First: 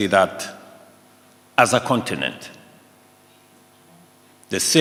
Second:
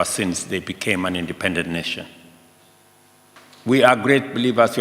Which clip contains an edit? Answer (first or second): second